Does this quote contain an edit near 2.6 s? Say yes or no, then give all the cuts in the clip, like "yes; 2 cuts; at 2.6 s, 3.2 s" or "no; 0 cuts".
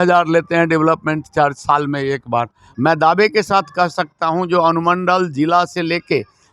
yes; 1 cut; at 2.6 s